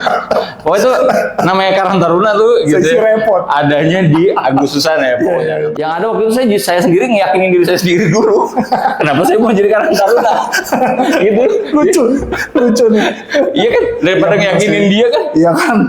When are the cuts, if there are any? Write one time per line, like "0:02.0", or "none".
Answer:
0:05.7